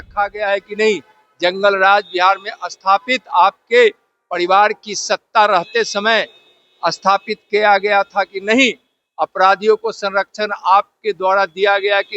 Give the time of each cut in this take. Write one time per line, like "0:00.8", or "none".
none